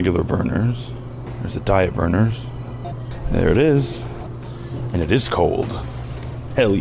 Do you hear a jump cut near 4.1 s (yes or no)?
yes